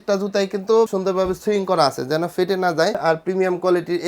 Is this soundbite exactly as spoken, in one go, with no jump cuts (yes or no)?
no